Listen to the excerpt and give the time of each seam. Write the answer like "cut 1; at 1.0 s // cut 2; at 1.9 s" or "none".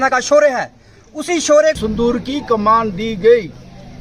cut 1; at 1.8 s